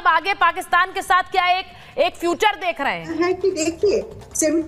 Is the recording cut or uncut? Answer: cut